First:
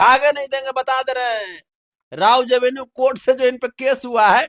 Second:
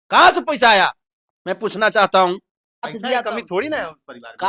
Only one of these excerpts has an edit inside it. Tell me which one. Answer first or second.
second